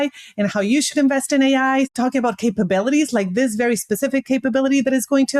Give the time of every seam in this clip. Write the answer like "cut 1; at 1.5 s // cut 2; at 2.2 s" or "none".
cut 1; at 1.9 s